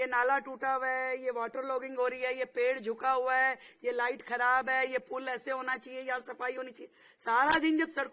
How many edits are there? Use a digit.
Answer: 0